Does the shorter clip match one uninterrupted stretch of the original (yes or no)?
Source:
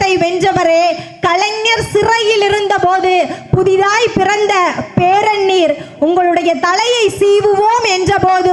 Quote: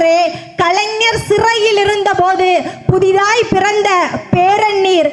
yes